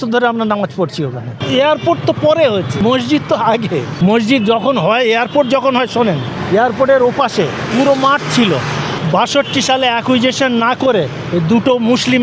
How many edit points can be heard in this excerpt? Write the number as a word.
six